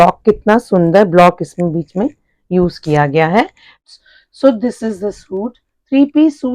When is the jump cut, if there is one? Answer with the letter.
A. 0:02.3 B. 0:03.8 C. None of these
B